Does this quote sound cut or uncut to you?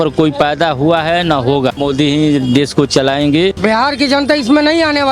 cut